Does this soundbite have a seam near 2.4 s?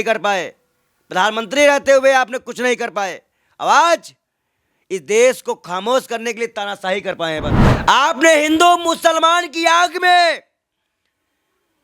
no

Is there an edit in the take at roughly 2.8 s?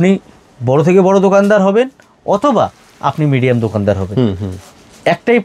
no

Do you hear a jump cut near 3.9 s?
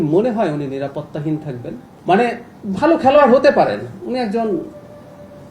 no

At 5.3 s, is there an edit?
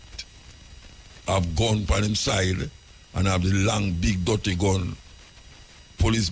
no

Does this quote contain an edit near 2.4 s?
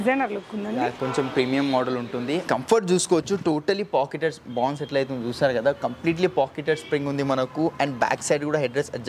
yes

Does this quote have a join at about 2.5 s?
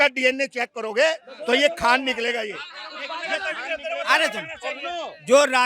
no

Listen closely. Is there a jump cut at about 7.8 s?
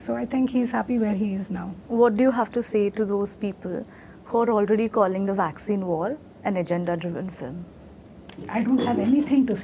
no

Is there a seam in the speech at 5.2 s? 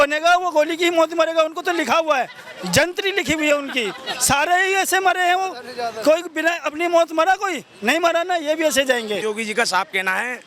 no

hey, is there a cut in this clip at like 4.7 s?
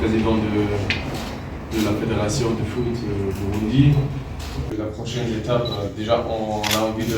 yes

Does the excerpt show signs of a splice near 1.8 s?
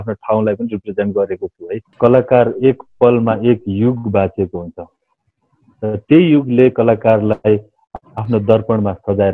yes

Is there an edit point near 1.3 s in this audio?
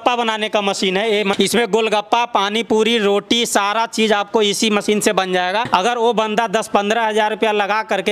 yes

